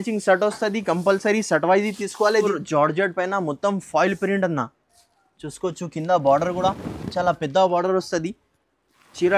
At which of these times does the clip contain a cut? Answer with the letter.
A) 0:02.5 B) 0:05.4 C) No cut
A